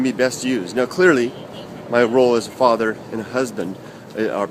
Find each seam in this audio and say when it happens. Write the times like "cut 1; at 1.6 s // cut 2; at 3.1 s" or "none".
cut 1; at 3.1 s